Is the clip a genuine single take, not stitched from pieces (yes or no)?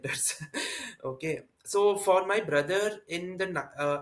yes